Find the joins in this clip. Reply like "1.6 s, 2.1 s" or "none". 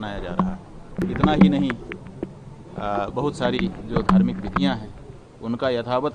1.0 s